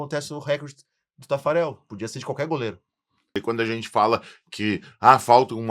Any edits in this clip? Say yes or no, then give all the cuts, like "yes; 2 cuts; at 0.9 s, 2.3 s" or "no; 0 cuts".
yes; 1 cut; at 3.3 s